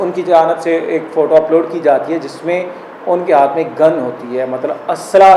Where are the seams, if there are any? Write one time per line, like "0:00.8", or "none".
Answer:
none